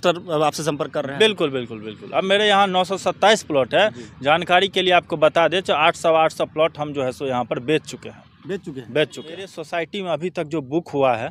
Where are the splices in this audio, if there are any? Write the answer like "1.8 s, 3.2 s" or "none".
9.6 s